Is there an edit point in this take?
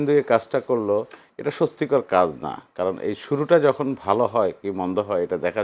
no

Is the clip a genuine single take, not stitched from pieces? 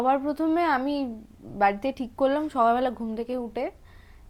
yes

